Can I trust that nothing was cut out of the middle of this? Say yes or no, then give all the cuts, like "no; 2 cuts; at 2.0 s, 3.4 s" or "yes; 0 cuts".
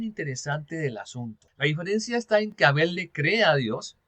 no; 1 cut; at 1.4 s